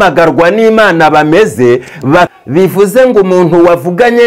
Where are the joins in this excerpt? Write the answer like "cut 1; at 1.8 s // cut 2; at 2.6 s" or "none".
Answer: cut 1; at 2.3 s